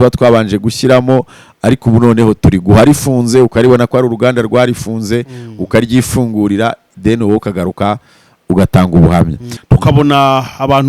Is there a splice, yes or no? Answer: yes